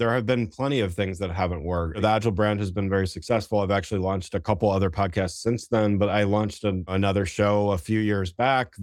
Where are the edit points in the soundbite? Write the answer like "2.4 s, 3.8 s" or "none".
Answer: 2.0 s, 6.9 s